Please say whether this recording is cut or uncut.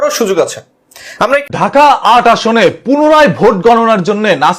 cut